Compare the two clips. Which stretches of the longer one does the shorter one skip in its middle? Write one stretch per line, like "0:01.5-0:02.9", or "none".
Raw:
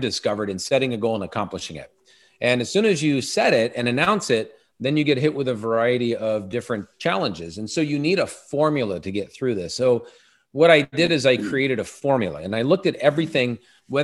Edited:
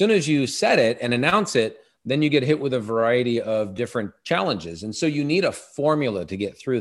none